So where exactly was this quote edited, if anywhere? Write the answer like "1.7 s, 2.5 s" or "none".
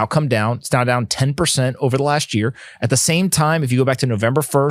none